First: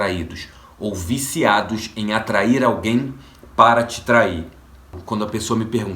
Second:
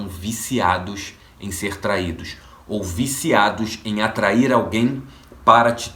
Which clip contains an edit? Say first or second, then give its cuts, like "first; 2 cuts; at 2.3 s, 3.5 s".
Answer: first; 1 cut; at 5.0 s